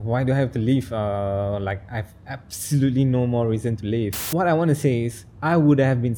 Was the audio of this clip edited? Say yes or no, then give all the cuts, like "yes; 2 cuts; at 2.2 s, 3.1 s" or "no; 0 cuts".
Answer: yes; 1 cut; at 4.1 s